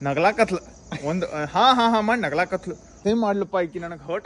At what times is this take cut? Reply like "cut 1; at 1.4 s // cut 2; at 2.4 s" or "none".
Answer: cut 1; at 2.9 s